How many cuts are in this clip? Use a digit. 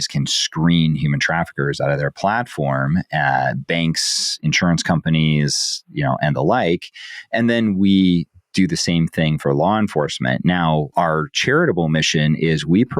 1